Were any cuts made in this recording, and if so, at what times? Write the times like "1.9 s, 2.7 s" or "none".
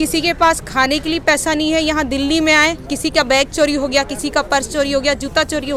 none